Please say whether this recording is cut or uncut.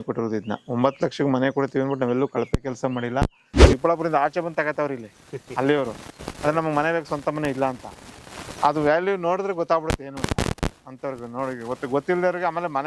cut